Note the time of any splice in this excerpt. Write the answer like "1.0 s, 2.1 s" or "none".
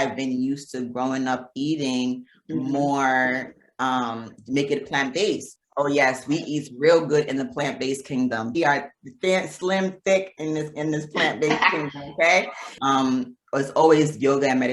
5.5 s, 8.6 s, 12.7 s